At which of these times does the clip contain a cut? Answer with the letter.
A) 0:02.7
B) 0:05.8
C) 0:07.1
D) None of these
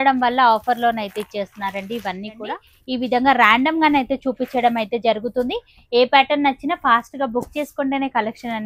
A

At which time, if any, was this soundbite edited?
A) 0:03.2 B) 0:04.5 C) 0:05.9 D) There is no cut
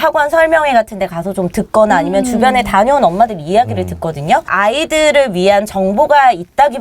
B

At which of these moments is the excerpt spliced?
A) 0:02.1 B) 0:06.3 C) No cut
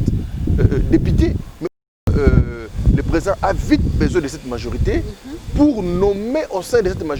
A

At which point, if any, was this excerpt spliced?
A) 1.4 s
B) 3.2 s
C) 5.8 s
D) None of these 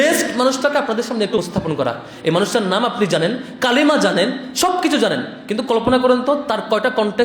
A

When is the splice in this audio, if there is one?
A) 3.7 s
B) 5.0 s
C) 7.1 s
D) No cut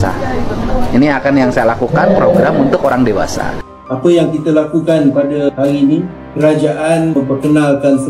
A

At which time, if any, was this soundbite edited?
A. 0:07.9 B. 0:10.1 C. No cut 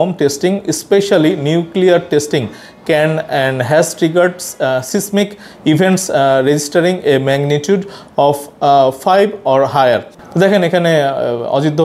B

